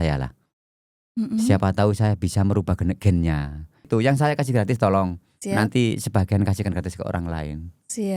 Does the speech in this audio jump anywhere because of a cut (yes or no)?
yes